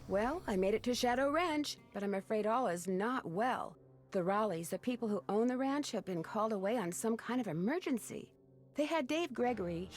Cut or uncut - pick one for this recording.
cut